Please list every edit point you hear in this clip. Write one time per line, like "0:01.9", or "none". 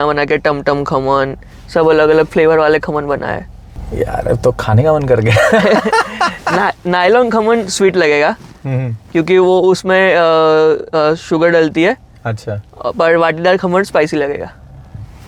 none